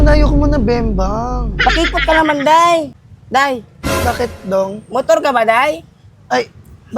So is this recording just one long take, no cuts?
no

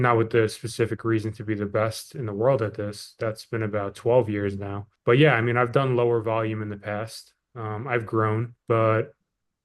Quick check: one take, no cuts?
yes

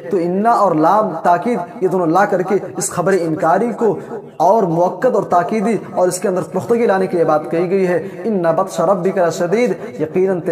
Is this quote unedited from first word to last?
yes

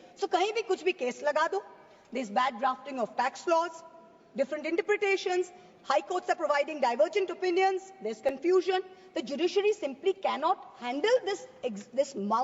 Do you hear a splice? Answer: no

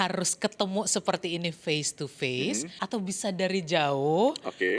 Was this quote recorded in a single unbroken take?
no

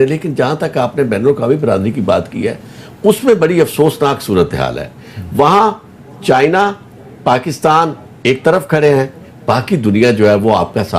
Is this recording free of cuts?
yes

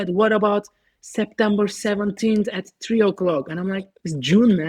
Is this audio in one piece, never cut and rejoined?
yes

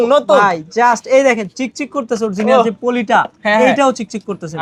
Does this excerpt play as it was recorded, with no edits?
yes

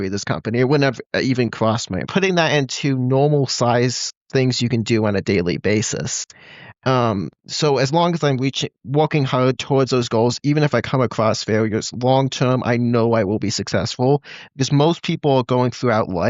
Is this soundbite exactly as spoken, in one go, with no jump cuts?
no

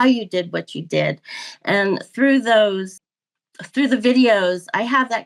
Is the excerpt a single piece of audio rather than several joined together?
yes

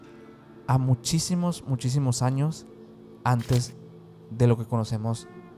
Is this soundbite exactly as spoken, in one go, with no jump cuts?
yes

